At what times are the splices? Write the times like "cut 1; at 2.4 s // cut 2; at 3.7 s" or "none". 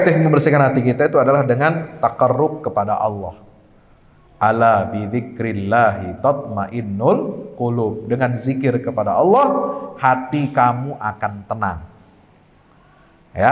none